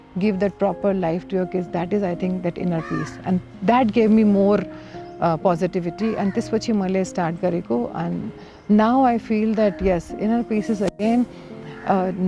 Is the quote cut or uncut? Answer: uncut